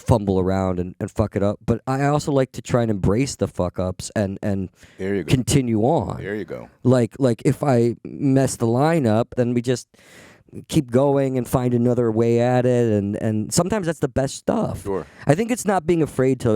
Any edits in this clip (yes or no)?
yes